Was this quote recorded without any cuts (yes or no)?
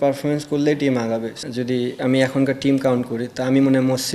no